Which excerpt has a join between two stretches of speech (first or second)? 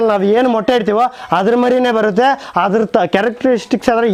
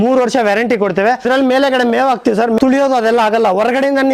second